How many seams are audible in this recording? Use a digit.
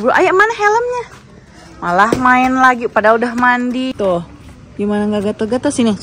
1